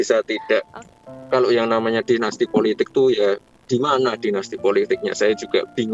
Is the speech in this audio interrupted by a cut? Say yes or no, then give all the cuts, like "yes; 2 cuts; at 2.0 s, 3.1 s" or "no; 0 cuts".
yes; 1 cut; at 0.9 s